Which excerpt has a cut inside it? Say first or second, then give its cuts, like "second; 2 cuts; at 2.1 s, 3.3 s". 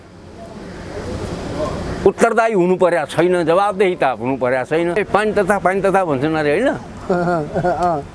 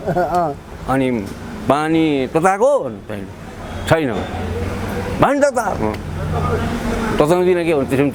first; 1 cut; at 5.0 s